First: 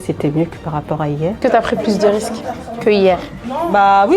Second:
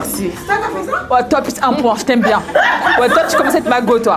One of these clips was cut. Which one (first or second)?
first